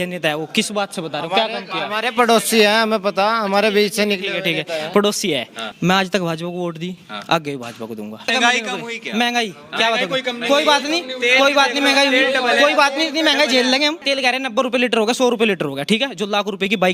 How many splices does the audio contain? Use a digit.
3